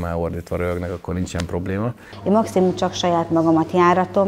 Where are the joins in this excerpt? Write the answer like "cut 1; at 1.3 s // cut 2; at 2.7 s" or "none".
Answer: cut 1; at 2.1 s

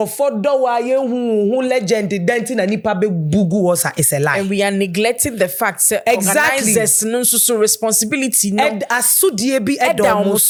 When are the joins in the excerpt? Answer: none

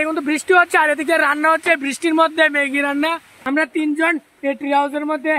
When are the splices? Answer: cut 1; at 3.4 s

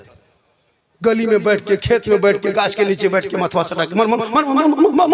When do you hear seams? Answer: none

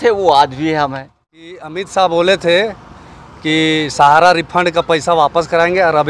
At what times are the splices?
cut 1; at 1.6 s

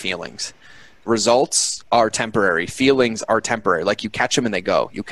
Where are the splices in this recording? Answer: cut 1; at 1.0 s

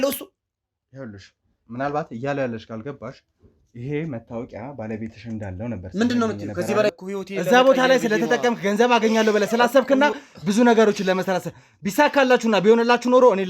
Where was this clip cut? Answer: cut 1; at 7.0 s

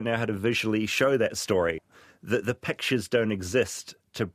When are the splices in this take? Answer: cut 1; at 1.8 s

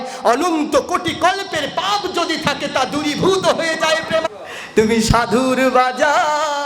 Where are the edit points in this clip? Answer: cut 1; at 4.3 s

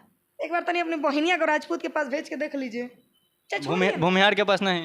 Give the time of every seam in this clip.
none

